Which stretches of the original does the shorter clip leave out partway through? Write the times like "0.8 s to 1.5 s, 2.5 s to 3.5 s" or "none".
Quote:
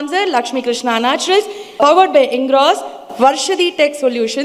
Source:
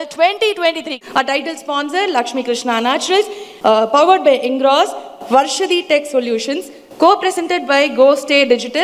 3.6 s to 3.9 s